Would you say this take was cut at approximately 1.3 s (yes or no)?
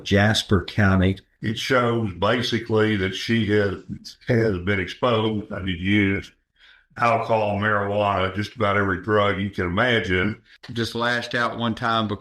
yes